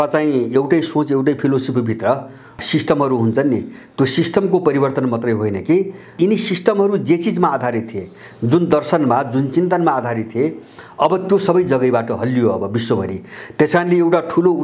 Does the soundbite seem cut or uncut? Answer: cut